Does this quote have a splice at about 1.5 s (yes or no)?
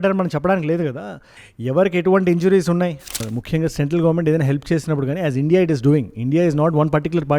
no